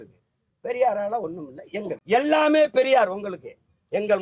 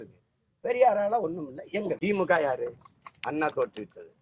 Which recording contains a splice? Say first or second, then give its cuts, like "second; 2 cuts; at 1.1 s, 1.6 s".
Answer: second; 1 cut; at 2.0 s